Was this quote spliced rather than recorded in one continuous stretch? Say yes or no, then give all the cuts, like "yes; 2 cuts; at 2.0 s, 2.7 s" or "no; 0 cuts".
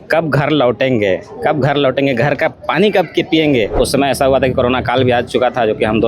yes; 1 cut; at 3.7 s